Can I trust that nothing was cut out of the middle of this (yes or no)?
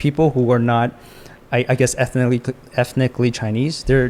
yes